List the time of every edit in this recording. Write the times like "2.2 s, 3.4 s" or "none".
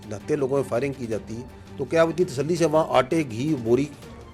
none